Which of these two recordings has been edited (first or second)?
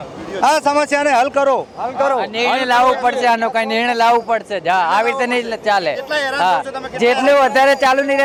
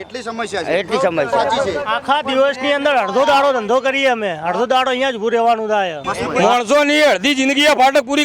second